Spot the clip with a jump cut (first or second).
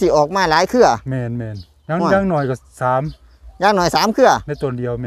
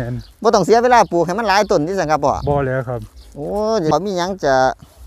second